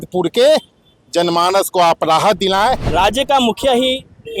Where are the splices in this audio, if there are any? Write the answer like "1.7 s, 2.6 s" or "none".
2.8 s